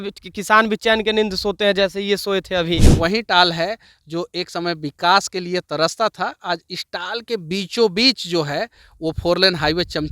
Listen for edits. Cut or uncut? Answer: cut